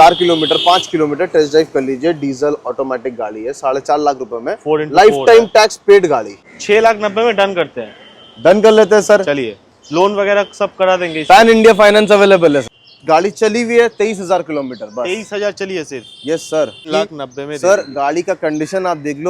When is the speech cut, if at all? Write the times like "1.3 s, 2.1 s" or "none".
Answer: 6.5 s, 12.8 s, 16.9 s